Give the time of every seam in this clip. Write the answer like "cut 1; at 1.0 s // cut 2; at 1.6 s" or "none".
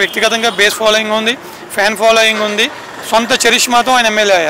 none